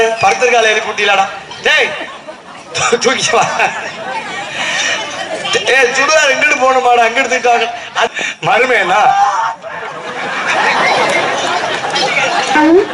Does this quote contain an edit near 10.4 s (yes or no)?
no